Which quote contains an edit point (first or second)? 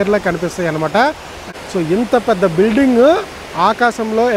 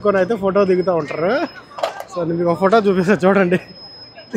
first